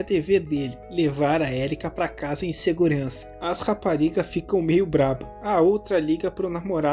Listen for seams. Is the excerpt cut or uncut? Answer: cut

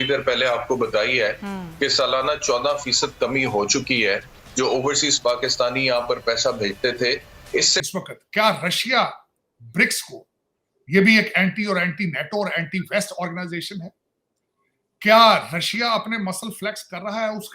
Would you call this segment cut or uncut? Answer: cut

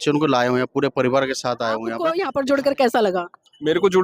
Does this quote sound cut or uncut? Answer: cut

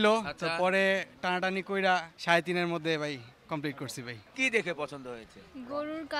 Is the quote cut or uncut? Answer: cut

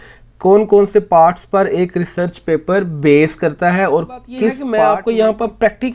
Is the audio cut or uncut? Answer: cut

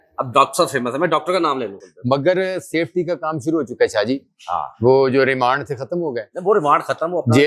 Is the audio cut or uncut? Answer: cut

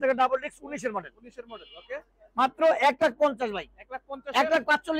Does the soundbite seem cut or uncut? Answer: uncut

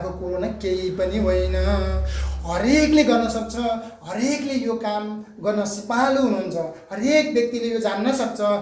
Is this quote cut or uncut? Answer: uncut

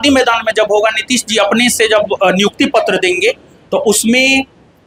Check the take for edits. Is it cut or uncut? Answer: uncut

